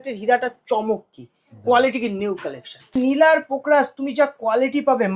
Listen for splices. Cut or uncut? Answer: cut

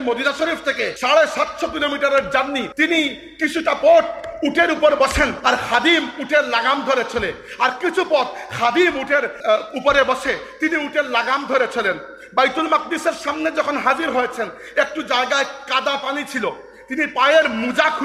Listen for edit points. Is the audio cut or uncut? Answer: cut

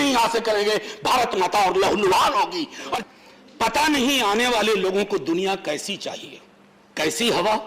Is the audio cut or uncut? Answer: cut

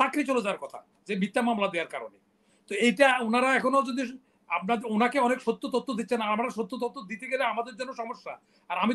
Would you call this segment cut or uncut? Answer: uncut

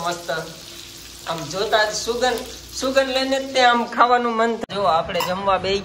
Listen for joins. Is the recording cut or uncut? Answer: cut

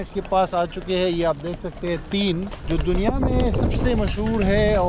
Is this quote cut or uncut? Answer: cut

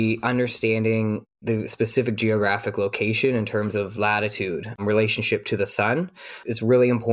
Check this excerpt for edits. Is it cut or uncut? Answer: uncut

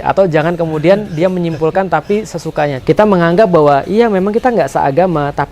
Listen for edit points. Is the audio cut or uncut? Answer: cut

